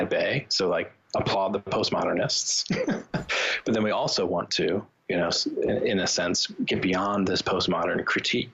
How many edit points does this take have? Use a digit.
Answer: 0